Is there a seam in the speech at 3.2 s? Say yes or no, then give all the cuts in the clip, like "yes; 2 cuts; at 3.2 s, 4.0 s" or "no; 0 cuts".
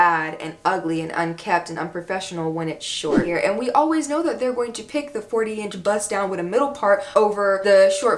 yes; 1 cut; at 3.2 s